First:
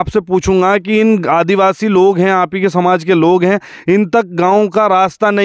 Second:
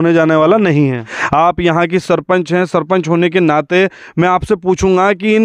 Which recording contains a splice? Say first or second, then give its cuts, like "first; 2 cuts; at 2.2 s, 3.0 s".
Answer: second; 1 cut; at 1.2 s